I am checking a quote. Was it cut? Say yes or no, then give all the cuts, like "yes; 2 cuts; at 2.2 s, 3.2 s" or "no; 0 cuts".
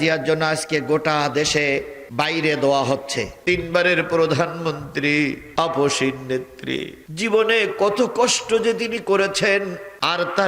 yes; 1 cut; at 3.4 s